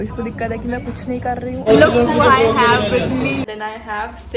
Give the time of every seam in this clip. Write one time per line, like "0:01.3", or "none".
0:01.6
0:03.5